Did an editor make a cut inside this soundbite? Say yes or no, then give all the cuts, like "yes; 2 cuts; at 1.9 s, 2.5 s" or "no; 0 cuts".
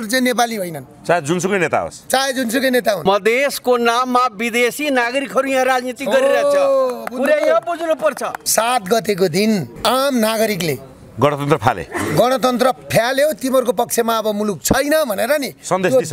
yes; 2 cuts; at 3.0 s, 8.3 s